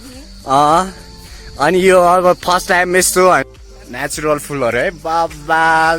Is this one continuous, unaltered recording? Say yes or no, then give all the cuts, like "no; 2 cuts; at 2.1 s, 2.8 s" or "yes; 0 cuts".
no; 1 cut; at 3.4 s